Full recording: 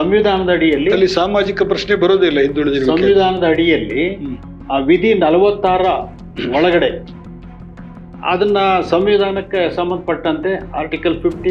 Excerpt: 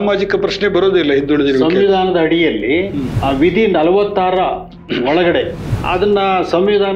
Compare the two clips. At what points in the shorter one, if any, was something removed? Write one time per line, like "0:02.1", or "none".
0:03.1
0:05.7